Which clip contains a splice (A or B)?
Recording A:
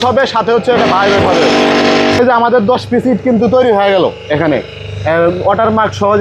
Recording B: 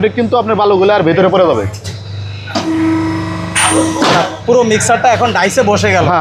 A